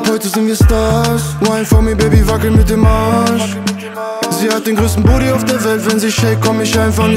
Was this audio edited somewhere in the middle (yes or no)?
no